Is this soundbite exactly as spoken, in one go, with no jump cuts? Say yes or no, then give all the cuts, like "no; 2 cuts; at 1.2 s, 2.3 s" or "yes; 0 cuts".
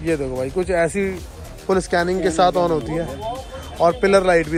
yes; 0 cuts